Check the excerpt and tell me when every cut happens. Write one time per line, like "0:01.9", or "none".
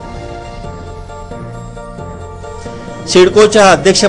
none